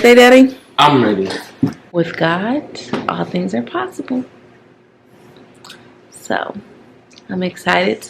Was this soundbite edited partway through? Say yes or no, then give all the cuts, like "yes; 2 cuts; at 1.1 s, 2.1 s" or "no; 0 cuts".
yes; 1 cut; at 1.8 s